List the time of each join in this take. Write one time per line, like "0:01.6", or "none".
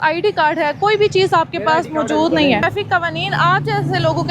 0:02.6

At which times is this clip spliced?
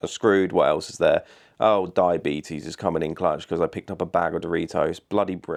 none

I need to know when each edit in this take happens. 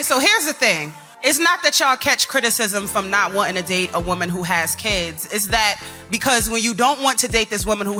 none

